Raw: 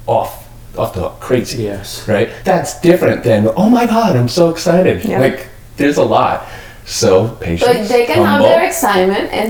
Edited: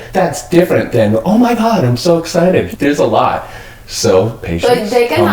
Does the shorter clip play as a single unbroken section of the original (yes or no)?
no